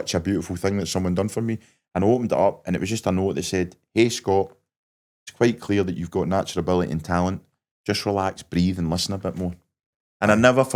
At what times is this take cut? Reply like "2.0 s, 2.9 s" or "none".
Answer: none